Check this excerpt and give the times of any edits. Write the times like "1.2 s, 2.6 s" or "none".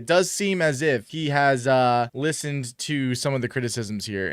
1.1 s, 2.1 s